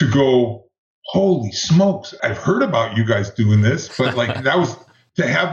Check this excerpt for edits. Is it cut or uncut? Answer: cut